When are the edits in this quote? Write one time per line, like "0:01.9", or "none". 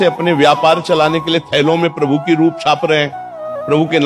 none